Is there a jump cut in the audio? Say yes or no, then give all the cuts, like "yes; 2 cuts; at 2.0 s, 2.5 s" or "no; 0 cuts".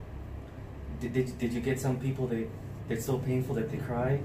no; 0 cuts